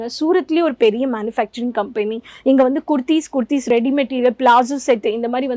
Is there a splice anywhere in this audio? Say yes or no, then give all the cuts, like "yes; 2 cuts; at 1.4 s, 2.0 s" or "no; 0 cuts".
yes; 1 cut; at 3.7 s